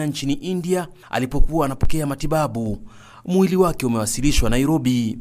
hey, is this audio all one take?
yes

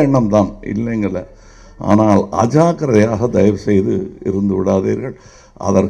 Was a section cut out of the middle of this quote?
no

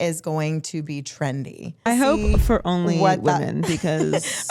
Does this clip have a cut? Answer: yes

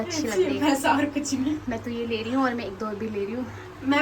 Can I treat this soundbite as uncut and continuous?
yes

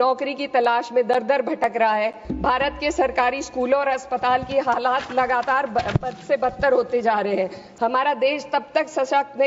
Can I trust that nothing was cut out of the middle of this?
no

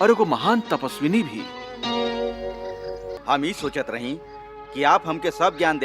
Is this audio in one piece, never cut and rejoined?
no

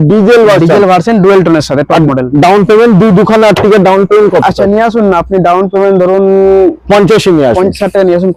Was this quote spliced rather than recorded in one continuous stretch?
no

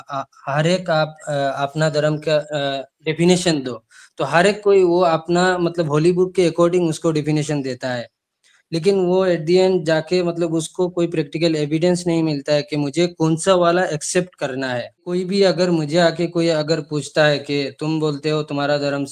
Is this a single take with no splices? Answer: no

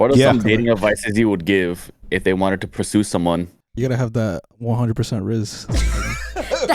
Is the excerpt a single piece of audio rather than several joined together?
no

